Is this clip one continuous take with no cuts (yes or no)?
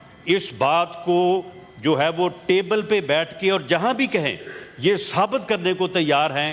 yes